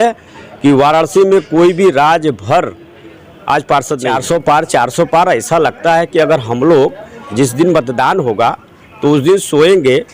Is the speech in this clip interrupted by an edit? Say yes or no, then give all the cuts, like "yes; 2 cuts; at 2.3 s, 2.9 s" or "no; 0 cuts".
yes; 1 cut; at 4.1 s